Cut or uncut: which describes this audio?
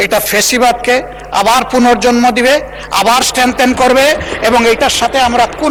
uncut